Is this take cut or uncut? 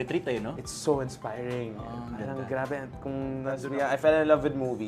cut